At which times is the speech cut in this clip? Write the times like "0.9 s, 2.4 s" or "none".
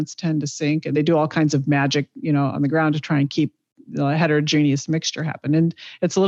none

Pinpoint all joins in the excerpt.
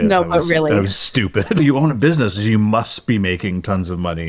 1.6 s

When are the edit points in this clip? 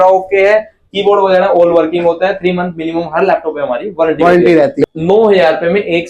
4.8 s

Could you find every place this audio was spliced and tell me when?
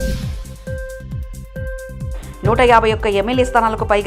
none

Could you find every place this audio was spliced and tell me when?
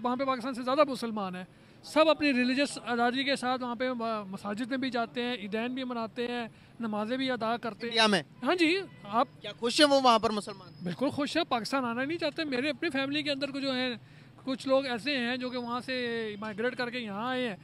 none

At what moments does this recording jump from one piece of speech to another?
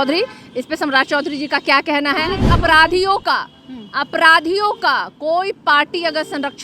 2.4 s

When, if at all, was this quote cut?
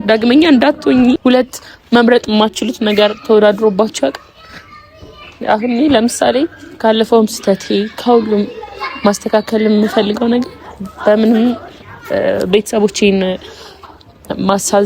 1.2 s

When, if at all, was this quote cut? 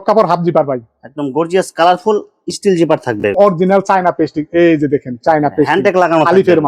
3.3 s

